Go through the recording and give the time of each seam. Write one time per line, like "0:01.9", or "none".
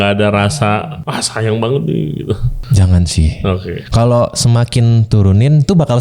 0:01.0
0:02.5